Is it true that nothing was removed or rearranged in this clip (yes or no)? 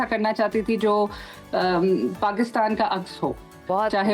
yes